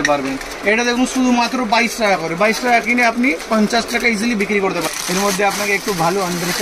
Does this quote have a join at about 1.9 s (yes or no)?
no